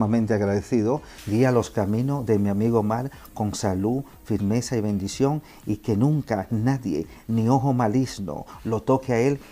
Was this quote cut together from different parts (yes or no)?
yes